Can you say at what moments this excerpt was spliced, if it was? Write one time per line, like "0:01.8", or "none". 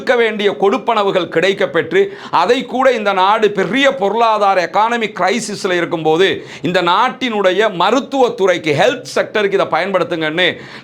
none